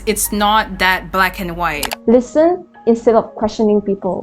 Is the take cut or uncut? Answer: cut